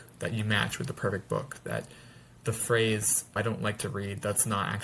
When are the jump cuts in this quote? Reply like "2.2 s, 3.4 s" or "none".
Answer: 3.4 s

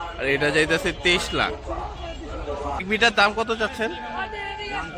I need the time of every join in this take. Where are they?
2.8 s

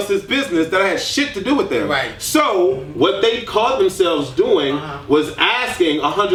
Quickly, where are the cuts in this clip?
none

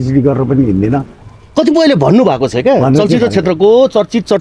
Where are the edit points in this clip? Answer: none

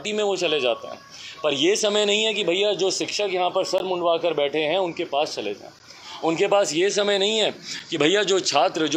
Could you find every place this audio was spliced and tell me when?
none

